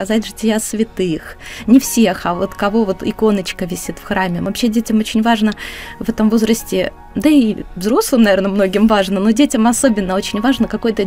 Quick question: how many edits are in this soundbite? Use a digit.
1